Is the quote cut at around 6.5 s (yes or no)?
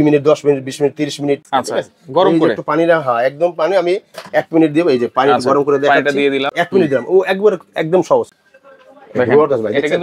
yes